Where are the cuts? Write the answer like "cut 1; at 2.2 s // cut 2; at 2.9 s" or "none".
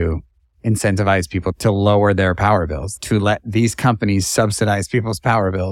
cut 1; at 1.6 s // cut 2; at 2.8 s